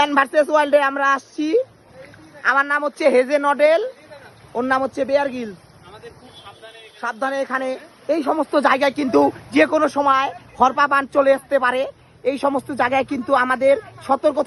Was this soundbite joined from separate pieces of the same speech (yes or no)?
no